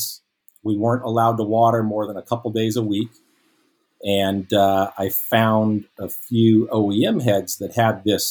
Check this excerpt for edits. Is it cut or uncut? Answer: uncut